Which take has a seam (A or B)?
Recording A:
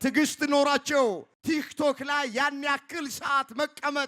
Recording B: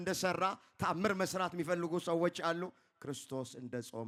A